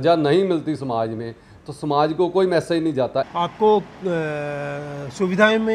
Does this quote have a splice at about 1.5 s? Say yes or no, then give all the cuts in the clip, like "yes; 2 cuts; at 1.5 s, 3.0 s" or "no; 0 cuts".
no; 1 cut; at 3.3 s